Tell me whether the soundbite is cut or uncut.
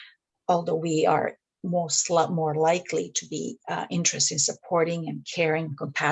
uncut